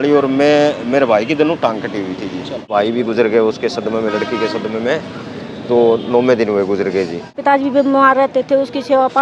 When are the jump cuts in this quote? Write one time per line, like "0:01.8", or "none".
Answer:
0:02.7
0:07.4